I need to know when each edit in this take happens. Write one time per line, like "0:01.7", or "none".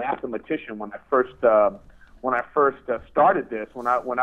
none